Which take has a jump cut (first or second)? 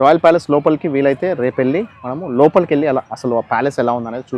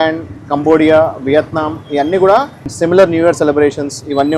second